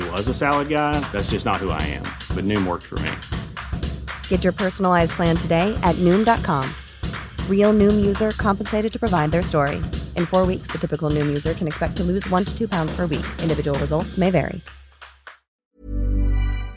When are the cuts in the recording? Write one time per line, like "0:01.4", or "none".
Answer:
0:15.7